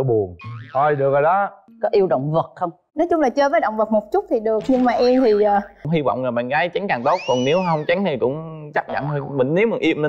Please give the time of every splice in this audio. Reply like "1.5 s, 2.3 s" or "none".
1.6 s, 5.8 s